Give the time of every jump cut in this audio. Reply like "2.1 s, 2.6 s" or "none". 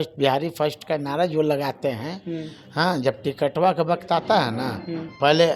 none

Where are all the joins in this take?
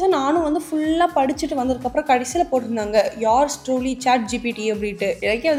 none

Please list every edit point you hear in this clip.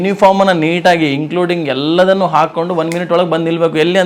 none

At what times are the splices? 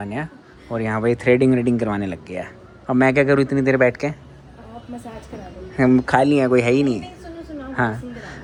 none

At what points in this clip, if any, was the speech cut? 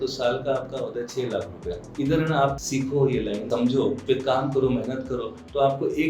1.8 s, 2.6 s, 3.7 s

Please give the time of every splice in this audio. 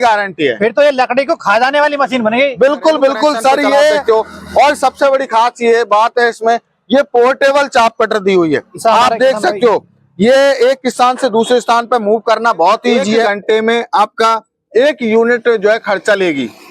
4.0 s, 13.2 s

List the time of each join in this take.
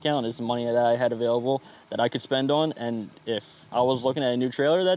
none

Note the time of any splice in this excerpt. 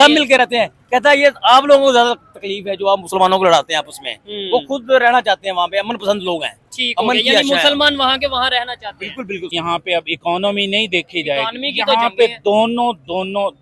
9.5 s

